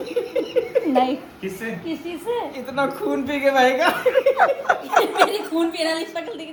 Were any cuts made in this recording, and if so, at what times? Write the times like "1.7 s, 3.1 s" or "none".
none